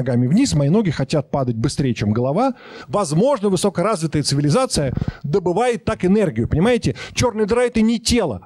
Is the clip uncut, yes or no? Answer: no